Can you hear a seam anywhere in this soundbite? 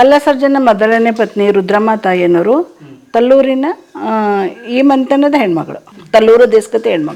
no; 0 cuts

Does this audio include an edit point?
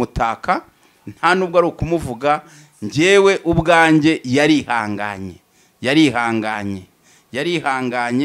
no; 0 cuts

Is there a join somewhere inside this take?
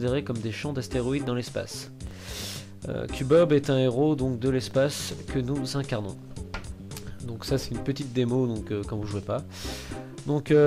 yes; 1 cut; at 5.1 s

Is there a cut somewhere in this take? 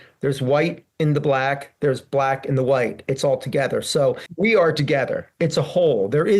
yes; 1 cut; at 4.3 s

